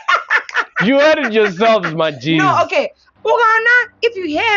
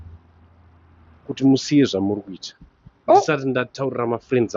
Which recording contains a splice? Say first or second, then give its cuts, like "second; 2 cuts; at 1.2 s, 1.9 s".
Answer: first; 1 cut; at 3.0 s